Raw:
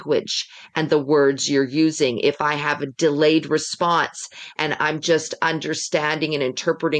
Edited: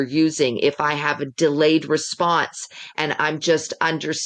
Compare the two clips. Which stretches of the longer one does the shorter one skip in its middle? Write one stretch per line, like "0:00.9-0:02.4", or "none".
none